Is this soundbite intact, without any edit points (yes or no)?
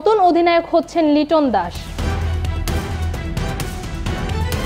no